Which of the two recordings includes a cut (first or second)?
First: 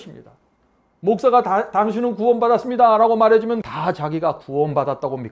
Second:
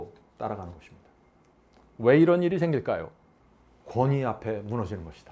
first